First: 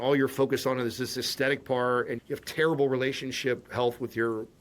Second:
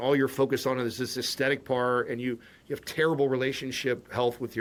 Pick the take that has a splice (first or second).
first